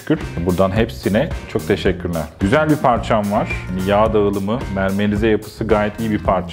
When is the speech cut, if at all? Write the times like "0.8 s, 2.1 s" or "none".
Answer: 2.4 s